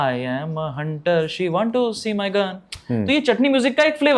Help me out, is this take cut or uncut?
uncut